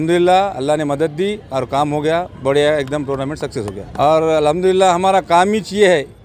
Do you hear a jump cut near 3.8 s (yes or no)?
yes